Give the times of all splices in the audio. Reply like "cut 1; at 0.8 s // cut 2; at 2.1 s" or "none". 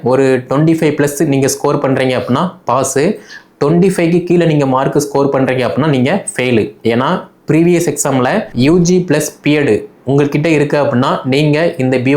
cut 1; at 8.5 s